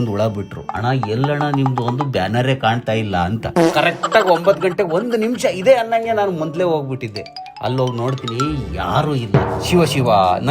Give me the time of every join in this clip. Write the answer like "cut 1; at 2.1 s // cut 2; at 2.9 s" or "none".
cut 1; at 3.4 s